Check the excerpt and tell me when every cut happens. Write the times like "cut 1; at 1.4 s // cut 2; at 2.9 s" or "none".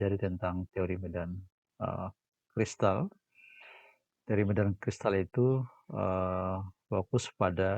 none